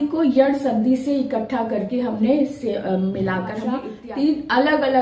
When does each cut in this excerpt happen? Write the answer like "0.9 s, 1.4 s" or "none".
3.9 s